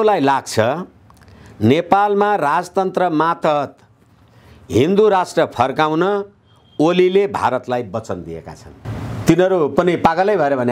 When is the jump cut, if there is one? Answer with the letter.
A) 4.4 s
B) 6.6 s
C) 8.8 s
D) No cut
C